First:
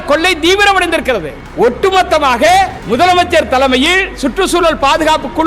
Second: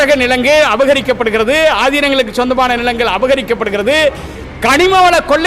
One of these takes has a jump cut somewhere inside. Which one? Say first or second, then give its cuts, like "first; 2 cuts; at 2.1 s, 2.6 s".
first; 2 cuts; at 1.4 s, 2.8 s